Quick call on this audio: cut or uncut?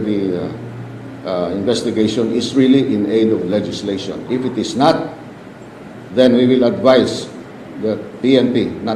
cut